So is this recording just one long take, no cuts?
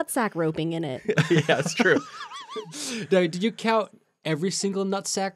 no; 1 cut; at 2.3 s

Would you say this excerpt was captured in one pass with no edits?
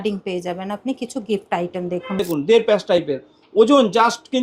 no; 1 cut; at 2.2 s

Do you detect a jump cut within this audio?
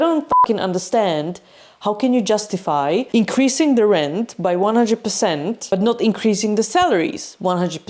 no; 0 cuts

